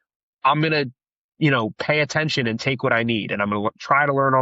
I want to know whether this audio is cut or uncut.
uncut